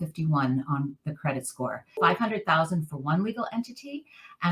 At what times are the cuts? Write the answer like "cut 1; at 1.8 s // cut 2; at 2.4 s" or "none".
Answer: cut 1; at 2.0 s